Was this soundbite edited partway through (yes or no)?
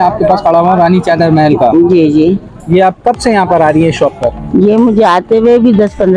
no